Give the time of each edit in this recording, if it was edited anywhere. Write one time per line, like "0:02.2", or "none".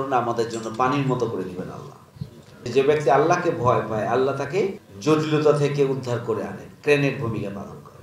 0:02.7
0:04.9